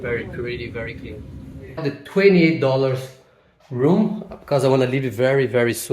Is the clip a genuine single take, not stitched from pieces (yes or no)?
no